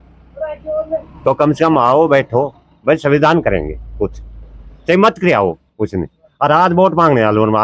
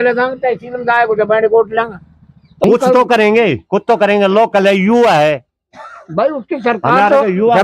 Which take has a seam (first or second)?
second